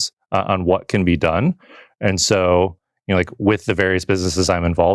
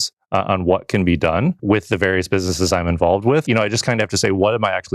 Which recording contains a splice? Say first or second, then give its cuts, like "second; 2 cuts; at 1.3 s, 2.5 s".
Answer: second; 2 cuts; at 1.6 s, 3.4 s